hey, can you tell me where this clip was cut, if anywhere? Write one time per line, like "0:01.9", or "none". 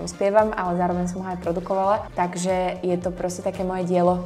0:02.1